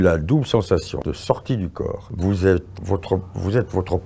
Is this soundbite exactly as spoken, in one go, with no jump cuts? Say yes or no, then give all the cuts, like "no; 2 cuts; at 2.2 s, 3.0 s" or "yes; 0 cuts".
no; 3 cuts; at 1.0 s, 2.0 s, 2.7 s